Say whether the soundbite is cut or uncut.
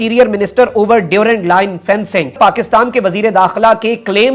uncut